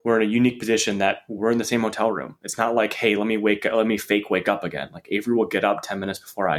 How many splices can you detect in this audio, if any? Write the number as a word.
zero